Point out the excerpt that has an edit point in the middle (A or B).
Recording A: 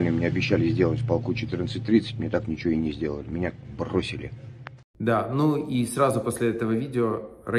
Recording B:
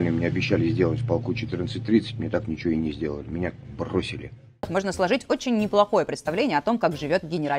B